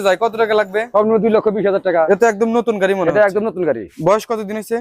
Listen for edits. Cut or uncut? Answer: cut